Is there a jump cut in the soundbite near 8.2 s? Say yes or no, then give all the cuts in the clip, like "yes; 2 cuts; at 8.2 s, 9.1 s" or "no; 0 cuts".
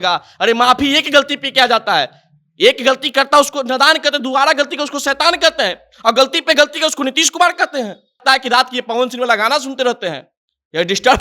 yes; 1 cut; at 8.2 s